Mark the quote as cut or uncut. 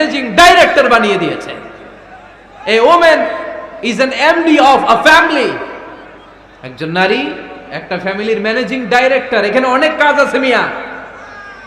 uncut